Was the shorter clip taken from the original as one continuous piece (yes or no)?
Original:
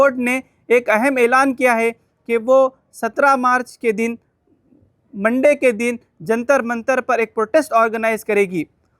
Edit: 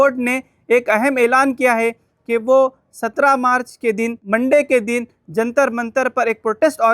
no